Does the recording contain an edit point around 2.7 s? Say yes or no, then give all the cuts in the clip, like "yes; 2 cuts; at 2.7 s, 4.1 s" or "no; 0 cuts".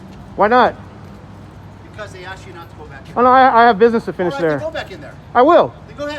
no; 0 cuts